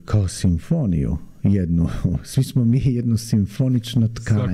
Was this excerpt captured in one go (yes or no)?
yes